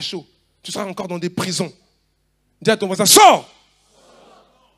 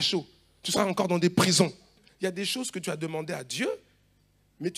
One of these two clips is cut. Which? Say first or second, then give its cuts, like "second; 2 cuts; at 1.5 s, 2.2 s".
second; 1 cut; at 2.0 s